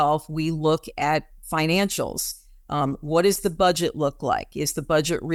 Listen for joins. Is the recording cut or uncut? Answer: uncut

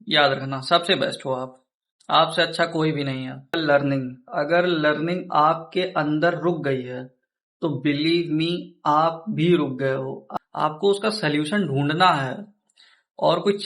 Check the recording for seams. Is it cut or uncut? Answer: cut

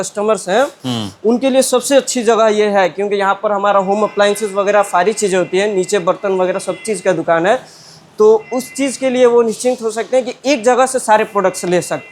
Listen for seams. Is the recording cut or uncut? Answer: uncut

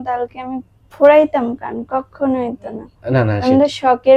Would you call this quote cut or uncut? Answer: uncut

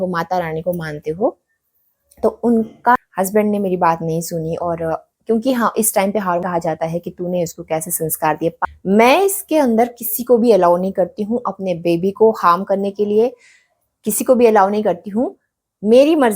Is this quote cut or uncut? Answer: cut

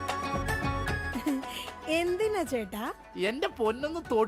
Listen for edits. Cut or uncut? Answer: uncut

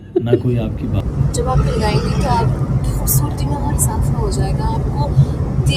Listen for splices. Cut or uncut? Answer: cut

